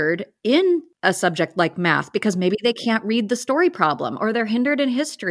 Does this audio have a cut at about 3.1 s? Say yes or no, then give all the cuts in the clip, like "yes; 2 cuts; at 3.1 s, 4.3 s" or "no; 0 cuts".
no; 1 cut; at 0.9 s